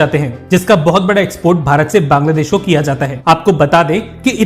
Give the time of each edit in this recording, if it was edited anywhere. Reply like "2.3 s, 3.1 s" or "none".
3.1 s